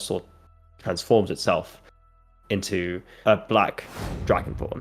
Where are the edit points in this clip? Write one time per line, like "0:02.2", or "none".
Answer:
0:03.1